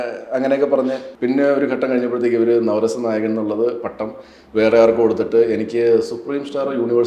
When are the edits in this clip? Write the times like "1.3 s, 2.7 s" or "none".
1.1 s